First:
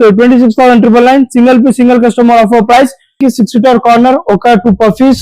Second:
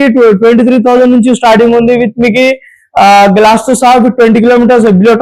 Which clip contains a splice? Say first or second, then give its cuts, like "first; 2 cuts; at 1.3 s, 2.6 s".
first; 1 cut; at 3.2 s